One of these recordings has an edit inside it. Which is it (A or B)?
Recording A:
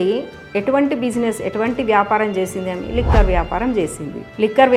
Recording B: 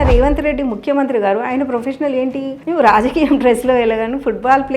B